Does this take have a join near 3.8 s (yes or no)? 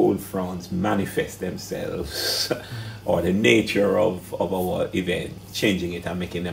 no